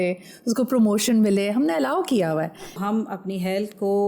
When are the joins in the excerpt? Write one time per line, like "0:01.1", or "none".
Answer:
0:02.8